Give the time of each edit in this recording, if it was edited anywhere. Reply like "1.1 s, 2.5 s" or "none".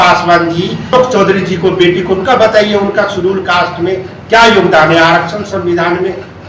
0.9 s